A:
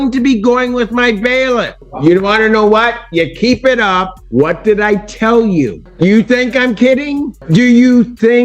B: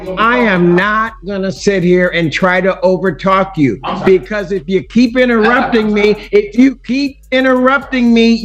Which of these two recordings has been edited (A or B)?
A